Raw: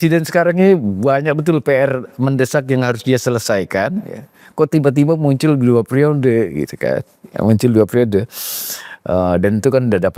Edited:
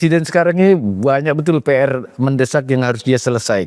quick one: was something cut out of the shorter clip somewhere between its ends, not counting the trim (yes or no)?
no